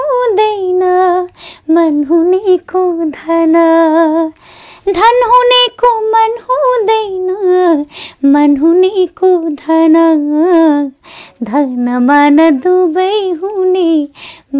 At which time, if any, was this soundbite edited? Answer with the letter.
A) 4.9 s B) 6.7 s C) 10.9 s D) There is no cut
D